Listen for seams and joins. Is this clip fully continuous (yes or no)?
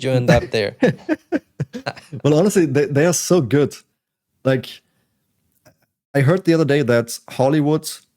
yes